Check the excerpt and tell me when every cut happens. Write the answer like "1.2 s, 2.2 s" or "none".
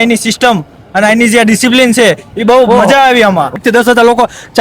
3.6 s